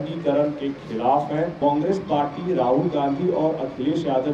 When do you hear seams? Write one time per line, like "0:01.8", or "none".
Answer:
0:01.6